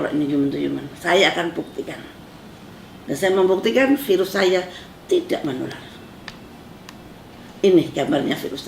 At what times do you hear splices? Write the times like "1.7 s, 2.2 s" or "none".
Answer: none